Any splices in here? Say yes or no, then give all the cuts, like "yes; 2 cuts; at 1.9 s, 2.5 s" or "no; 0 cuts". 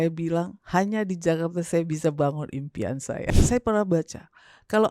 yes; 1 cut; at 3.3 s